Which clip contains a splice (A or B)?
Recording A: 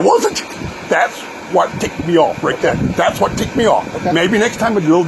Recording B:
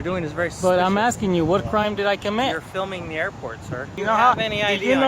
B